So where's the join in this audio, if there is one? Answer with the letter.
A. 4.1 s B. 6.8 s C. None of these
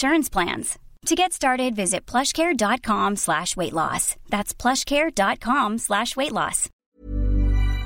B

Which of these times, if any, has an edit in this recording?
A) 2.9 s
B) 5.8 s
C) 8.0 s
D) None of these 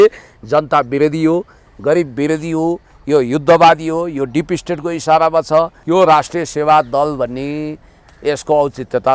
B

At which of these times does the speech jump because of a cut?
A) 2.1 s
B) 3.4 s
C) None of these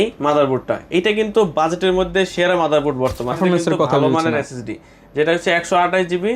B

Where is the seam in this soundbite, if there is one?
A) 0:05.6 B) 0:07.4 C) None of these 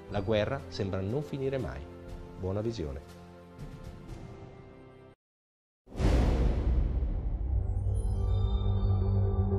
B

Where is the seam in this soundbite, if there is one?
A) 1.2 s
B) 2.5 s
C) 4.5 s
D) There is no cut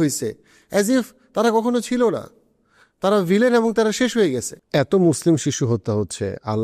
C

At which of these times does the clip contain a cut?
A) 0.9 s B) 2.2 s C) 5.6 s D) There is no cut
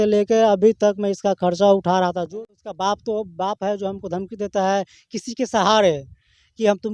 B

